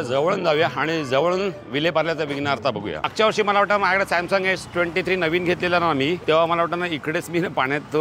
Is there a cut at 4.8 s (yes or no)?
no